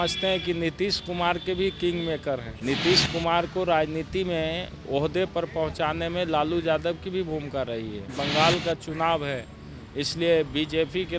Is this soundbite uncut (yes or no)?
no